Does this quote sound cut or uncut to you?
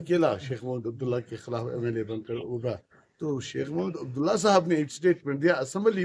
uncut